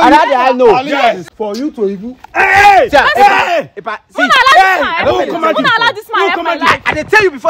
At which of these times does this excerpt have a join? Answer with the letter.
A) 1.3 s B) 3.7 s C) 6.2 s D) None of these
A